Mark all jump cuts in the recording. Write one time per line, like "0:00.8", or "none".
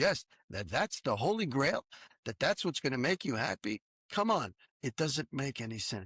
0:02.0
0:03.9
0:04.6